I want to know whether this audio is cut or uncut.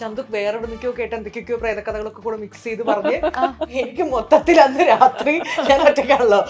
uncut